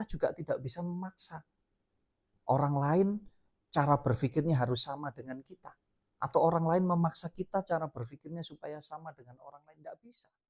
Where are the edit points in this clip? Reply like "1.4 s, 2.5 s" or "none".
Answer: none